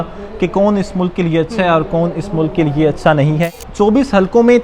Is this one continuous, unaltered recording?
no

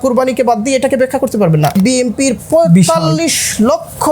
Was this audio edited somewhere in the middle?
yes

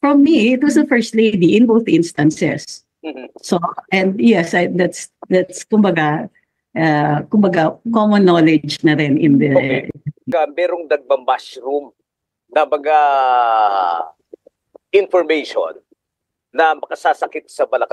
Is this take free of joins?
no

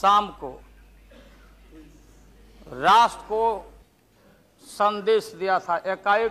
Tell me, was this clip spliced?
no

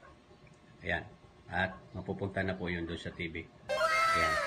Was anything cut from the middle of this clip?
yes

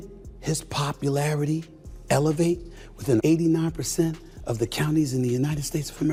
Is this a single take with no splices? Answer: yes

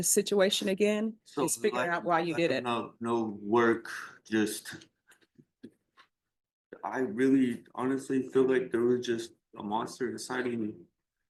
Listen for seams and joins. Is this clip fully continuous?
yes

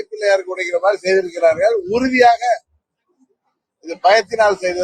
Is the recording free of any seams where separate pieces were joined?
yes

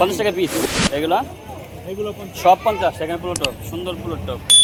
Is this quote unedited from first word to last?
yes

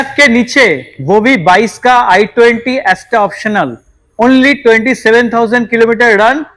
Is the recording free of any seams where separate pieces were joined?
yes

